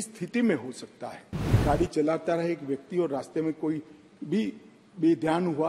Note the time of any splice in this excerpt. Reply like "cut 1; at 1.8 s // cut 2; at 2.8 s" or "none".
cut 1; at 1.6 s